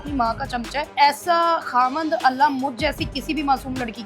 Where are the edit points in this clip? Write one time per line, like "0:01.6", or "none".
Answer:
0:00.9